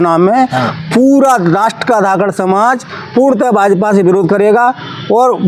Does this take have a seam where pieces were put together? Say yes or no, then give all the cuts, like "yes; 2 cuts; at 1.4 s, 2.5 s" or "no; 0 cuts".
no; 0 cuts